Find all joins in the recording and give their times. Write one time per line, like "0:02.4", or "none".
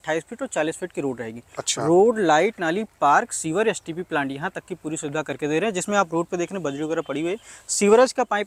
none